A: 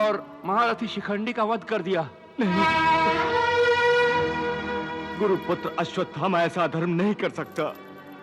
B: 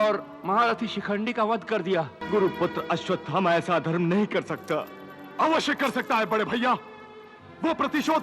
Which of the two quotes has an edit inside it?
B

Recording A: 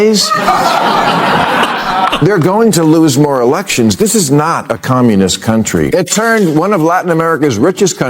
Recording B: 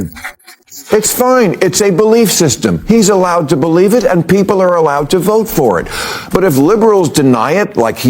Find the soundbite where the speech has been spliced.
A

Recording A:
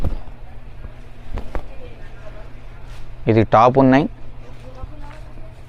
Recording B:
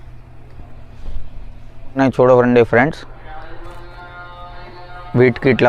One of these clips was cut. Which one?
B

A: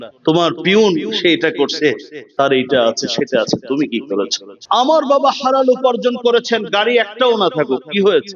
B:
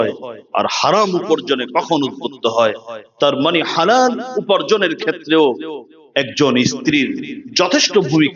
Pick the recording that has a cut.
A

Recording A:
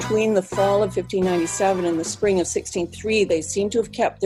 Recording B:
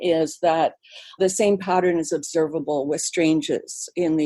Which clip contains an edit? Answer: B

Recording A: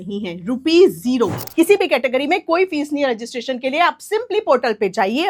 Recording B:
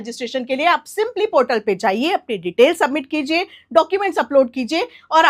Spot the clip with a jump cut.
A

